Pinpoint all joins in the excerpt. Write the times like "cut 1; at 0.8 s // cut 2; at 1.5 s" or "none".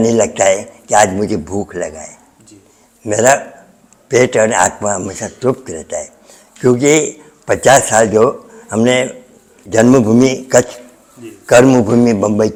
none